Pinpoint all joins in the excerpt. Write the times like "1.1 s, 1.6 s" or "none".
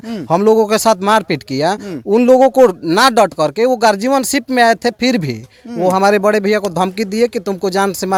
none